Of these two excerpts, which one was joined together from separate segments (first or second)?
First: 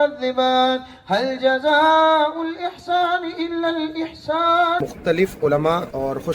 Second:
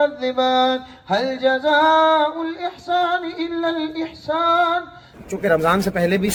first